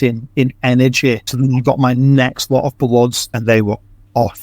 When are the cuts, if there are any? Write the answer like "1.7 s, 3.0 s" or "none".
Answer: 1.3 s, 3.4 s